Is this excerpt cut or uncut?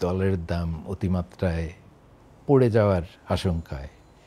uncut